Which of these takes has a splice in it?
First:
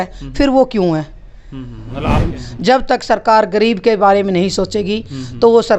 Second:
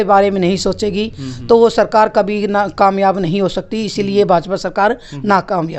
first; 1 cut; at 2.3 s

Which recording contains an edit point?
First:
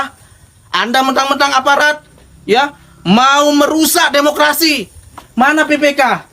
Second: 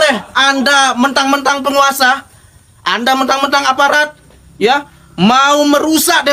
first; 1 cut; at 5.2 s

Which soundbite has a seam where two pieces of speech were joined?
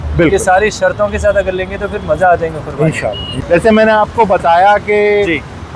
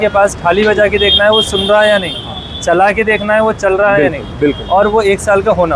first; 1 cut; at 3.3 s

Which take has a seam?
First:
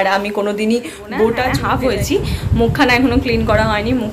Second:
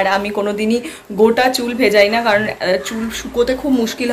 first; 1 cut; at 1.6 s

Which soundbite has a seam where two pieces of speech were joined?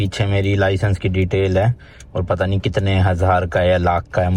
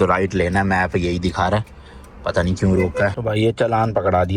second; 1 cut; at 3.2 s

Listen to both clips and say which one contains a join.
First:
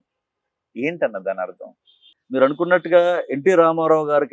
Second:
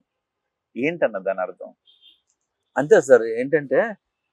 first; 1 cut; at 2.1 s

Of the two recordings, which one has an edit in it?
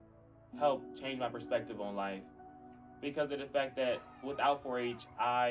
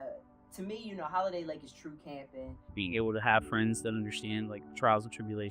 second; 1 cut; at 2.6 s

